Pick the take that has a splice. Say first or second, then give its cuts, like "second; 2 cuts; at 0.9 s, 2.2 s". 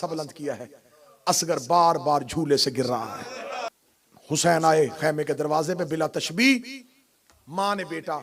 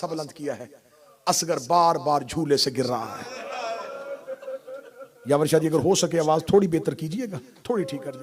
first; 1 cut; at 3.7 s